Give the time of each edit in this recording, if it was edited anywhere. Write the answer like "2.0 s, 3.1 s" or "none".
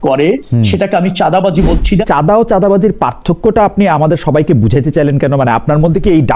2.0 s